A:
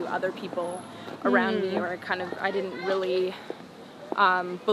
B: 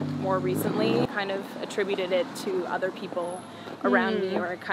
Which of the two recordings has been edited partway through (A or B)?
B